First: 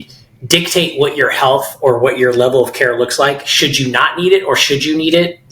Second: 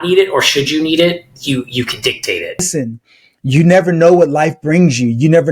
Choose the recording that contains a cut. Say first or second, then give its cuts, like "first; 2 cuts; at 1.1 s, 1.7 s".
second; 1 cut; at 2.7 s